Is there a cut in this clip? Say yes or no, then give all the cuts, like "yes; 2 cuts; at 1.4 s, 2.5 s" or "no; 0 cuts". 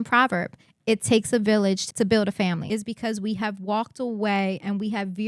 yes; 2 cuts; at 1.8 s, 2.6 s